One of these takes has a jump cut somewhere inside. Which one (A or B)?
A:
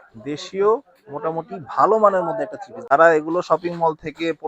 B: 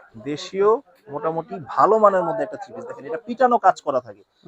A